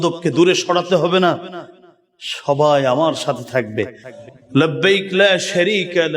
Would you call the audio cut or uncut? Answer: cut